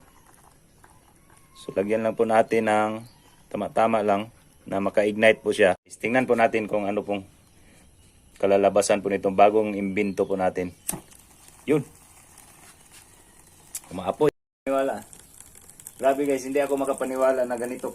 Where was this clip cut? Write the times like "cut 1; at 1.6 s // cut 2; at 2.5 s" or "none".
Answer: cut 1; at 6.0 s // cut 2; at 14.3 s